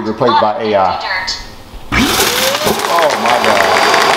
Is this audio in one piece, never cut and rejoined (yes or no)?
yes